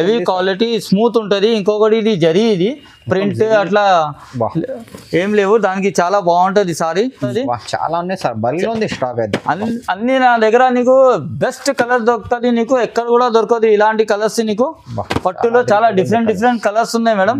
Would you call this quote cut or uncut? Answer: cut